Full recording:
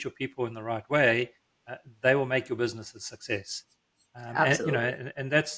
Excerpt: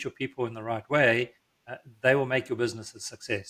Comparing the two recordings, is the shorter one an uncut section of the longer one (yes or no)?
yes